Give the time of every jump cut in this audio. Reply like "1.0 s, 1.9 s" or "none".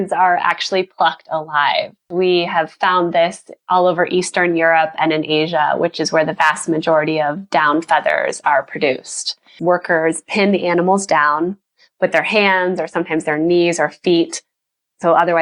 2.1 s, 9.6 s